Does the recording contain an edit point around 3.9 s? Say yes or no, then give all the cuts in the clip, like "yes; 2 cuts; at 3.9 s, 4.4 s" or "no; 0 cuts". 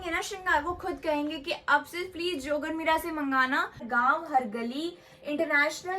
yes; 1 cut; at 3.9 s